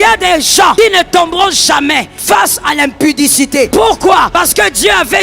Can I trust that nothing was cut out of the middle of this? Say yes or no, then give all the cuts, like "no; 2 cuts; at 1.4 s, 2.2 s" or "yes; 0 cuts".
no; 4 cuts; at 0.7 s, 2.1 s, 3.7 s, 4.3 s